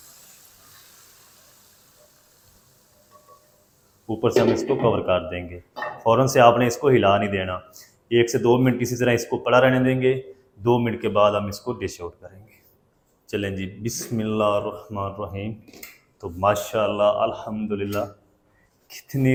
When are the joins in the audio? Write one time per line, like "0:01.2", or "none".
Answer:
none